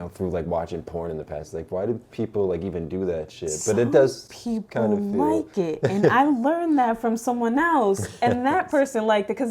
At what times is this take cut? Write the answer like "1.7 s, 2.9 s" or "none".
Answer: none